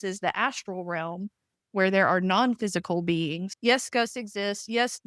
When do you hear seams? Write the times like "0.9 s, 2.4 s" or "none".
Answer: 3.5 s